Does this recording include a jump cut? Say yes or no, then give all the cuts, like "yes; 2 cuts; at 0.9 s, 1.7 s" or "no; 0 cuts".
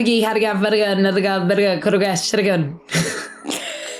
no; 0 cuts